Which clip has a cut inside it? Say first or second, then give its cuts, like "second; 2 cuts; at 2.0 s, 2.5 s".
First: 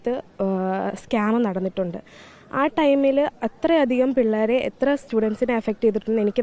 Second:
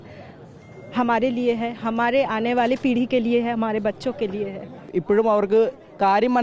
second; 1 cut; at 4.9 s